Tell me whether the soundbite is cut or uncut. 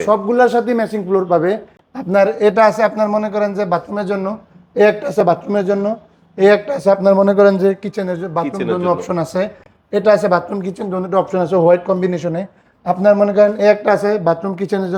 uncut